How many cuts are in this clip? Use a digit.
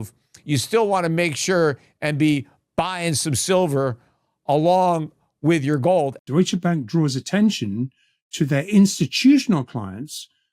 1